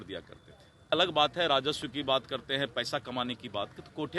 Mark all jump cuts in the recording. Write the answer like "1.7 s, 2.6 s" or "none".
0.9 s